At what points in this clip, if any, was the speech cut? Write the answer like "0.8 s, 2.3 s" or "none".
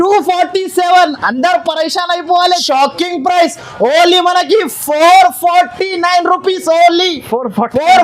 2.5 s